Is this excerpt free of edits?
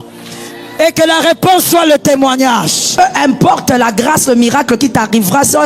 no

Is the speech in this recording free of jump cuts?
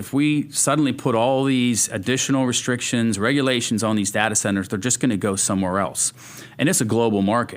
yes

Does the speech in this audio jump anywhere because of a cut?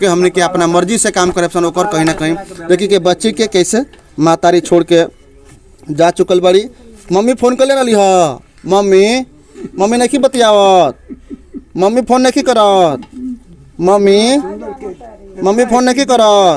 no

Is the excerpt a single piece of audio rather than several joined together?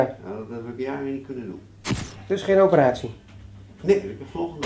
no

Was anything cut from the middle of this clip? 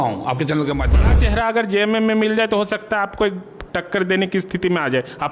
yes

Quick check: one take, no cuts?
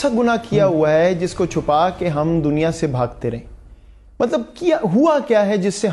yes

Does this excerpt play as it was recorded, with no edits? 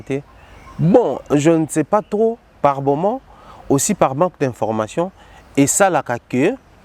yes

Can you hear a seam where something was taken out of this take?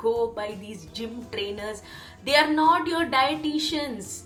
no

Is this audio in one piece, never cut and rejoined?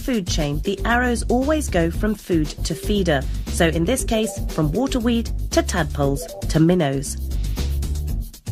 yes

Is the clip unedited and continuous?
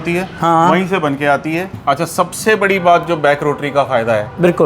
no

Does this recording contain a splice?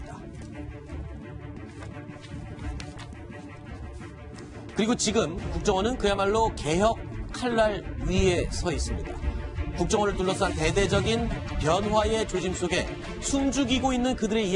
no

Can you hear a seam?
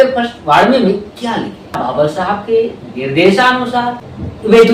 yes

